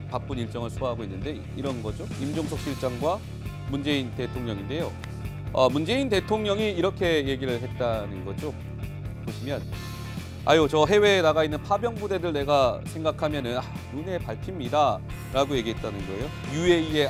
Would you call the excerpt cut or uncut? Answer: uncut